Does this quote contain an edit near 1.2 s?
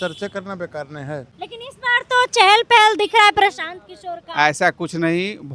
yes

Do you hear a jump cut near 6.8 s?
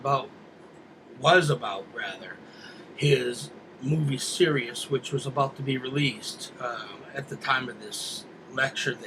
no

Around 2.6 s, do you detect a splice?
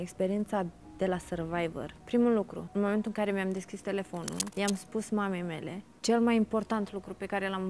yes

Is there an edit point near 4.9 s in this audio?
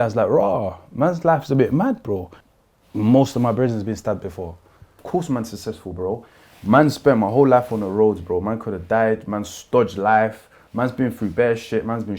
yes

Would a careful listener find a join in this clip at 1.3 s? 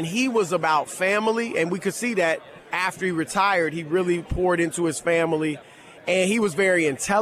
no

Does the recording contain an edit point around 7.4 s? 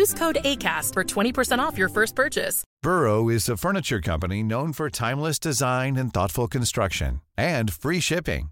no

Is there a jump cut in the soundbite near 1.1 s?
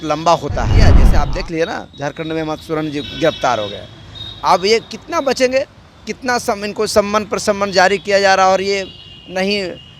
yes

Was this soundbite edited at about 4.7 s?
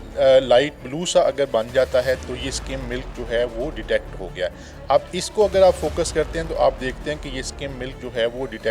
no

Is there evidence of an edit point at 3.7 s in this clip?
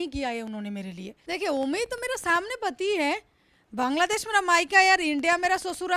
no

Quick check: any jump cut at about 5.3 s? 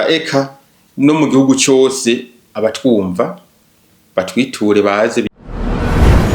yes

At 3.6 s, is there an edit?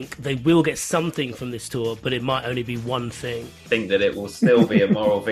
yes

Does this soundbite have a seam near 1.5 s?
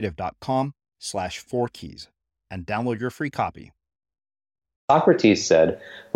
no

